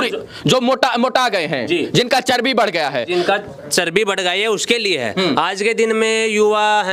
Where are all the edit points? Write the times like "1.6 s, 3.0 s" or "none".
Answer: none